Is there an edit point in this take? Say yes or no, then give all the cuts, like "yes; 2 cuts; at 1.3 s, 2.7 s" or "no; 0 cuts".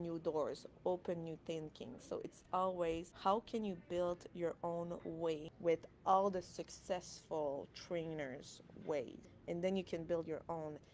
yes; 3 cuts; at 3.1 s, 5.5 s, 9.3 s